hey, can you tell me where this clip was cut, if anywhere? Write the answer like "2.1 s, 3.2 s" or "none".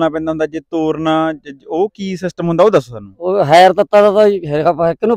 none